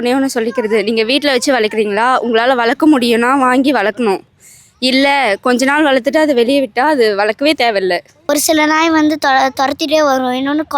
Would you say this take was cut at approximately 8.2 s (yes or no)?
yes